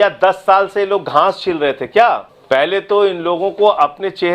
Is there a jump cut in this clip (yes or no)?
yes